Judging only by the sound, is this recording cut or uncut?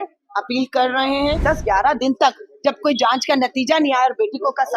cut